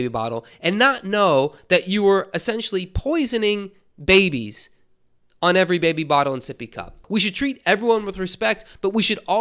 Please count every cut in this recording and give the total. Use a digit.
1